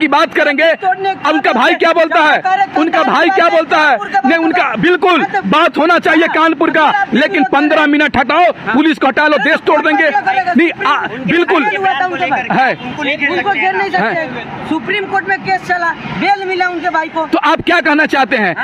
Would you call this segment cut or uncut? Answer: uncut